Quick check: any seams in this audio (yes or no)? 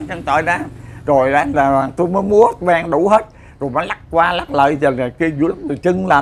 no